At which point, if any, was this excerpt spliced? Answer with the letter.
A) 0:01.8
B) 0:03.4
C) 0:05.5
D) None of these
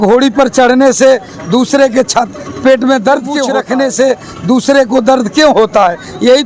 B